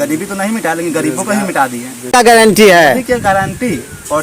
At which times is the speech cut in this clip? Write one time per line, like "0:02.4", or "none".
0:02.2